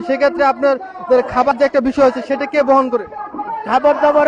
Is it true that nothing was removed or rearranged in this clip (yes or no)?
no